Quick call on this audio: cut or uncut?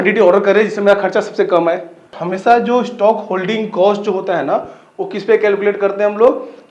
cut